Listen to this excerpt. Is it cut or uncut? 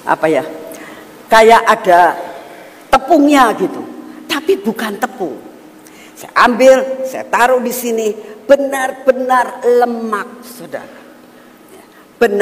uncut